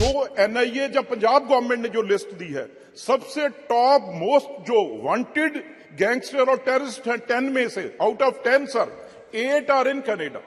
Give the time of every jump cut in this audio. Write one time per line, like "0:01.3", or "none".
none